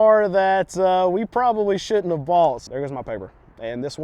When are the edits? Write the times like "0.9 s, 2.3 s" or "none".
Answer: 2.6 s